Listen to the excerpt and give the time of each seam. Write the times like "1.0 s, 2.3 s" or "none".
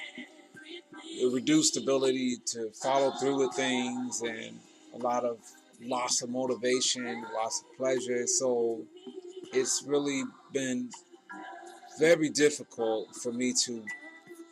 3.5 s